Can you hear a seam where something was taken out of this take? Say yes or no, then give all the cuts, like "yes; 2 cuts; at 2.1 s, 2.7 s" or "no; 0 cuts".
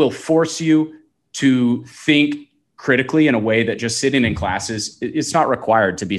no; 0 cuts